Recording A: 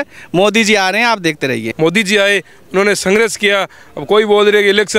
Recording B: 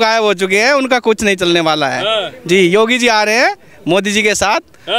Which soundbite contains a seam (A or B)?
A